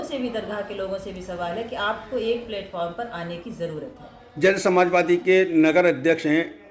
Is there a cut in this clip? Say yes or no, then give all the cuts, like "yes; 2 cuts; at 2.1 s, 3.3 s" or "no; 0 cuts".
no; 0 cuts